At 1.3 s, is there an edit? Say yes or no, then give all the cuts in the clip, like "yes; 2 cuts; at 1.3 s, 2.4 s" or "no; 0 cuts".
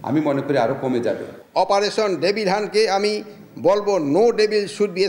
yes; 1 cut; at 1.3 s